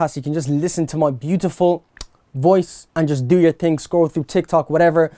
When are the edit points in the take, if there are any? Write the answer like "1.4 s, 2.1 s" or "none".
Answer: 2.8 s

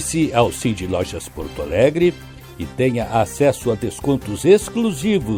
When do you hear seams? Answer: none

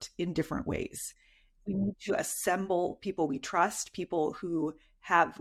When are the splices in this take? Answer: none

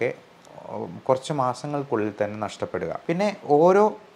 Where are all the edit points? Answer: 3.0 s

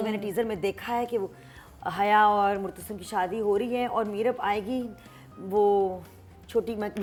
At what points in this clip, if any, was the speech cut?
none

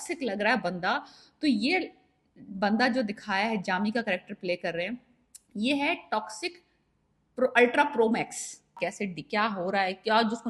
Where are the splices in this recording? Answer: 8.7 s

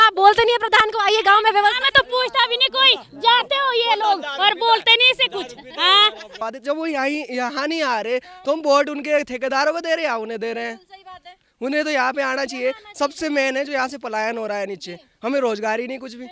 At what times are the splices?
6.4 s

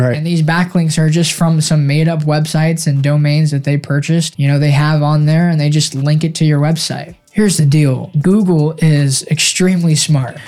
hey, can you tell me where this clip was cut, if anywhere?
4.3 s

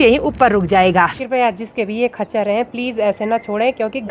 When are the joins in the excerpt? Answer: 1.2 s

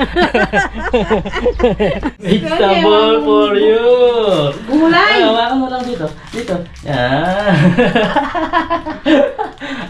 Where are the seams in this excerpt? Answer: 2.2 s

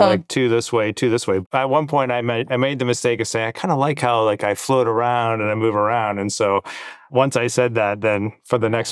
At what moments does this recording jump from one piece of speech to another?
1.4 s, 7.1 s

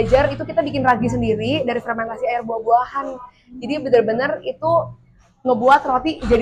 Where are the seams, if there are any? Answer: none

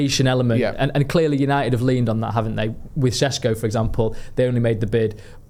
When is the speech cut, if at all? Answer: none

